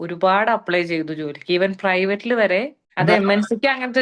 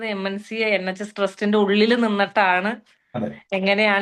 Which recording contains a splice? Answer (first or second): first